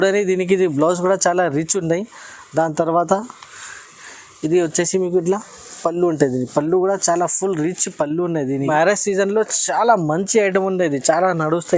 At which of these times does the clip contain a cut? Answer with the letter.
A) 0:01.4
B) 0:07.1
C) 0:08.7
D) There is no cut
C